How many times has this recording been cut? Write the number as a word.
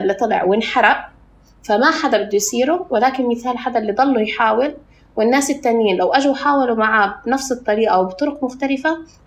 zero